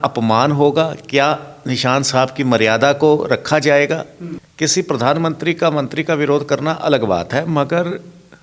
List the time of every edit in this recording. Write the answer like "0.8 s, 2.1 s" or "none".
4.4 s